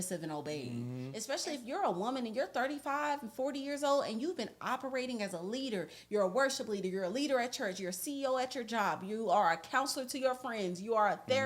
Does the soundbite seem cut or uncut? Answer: cut